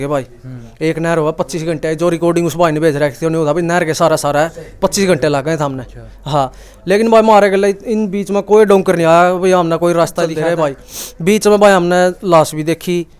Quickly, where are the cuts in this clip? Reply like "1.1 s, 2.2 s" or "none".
10.4 s

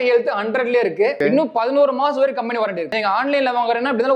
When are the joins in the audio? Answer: 1.2 s, 2.8 s

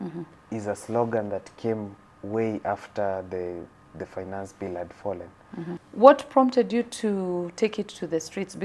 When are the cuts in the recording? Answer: 5.8 s

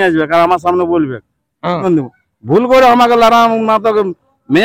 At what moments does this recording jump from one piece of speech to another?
1.8 s

